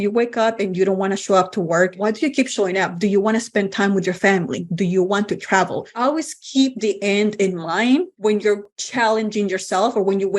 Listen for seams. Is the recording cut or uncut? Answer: cut